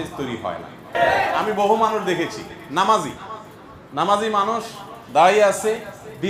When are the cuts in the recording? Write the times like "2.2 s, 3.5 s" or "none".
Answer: 0.9 s